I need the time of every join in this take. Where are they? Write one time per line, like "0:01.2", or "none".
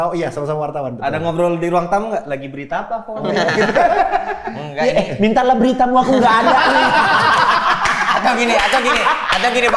none

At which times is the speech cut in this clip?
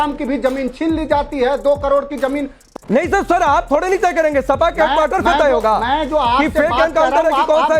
0:02.6

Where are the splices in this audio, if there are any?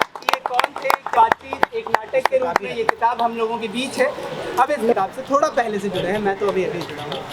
0:01.1
0:04.9

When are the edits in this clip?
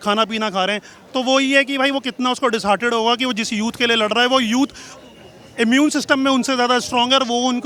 none

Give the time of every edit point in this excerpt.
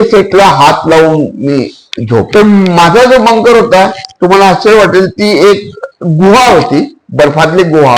0:02.3

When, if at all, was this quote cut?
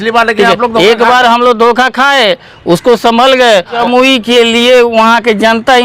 0:03.8

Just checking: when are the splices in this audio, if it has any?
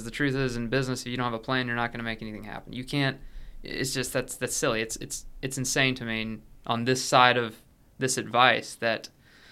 none

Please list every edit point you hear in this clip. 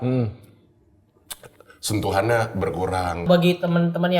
0:03.2

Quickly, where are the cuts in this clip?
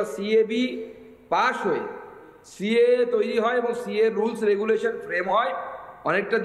none

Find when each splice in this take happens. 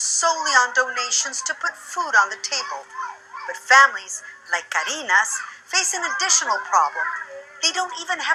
none

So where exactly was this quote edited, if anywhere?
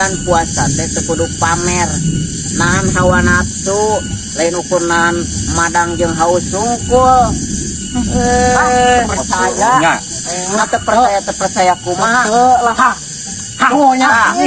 none

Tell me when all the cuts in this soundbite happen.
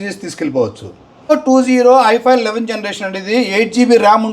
0:01.3

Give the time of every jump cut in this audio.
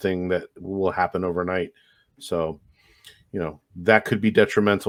none

